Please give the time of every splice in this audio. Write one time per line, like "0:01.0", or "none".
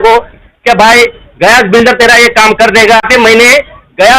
0:03.0